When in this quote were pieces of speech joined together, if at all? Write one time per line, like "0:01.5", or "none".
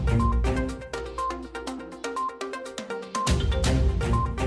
0:02.3